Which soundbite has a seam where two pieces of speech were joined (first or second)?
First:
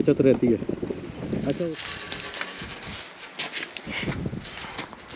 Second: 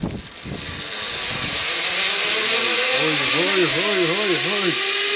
first